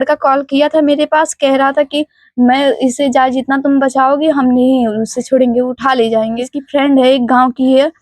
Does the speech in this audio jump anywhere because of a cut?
yes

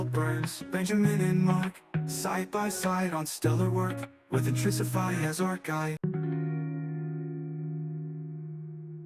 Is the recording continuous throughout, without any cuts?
no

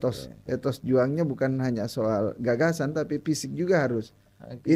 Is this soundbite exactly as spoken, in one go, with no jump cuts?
yes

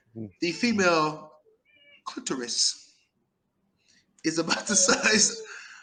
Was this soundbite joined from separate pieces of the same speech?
no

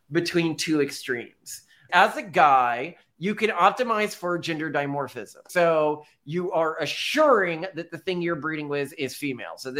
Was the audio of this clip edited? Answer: yes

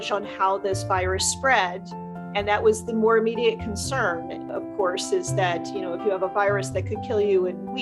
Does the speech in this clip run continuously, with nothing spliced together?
yes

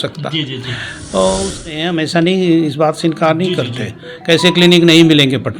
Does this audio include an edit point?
yes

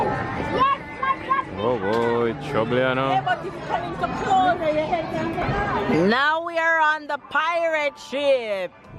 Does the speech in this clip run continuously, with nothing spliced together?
no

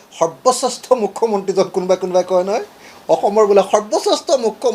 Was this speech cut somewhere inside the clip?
no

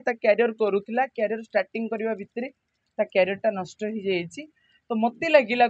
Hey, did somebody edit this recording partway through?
no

